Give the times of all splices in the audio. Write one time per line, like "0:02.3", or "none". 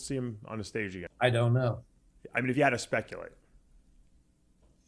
0:01.0